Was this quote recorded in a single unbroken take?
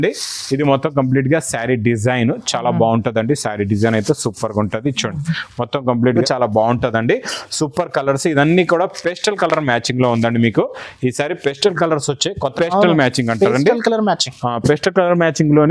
no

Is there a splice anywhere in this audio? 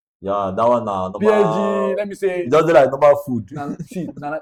no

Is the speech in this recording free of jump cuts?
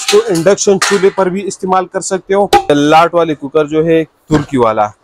no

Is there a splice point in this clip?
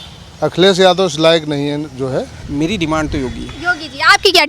yes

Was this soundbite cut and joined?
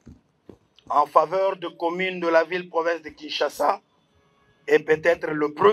no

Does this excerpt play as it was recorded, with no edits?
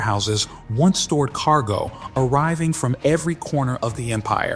yes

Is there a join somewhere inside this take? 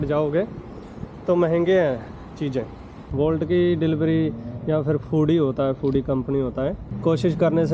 yes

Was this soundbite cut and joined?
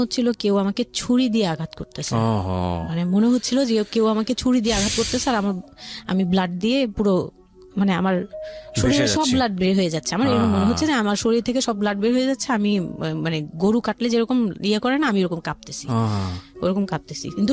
no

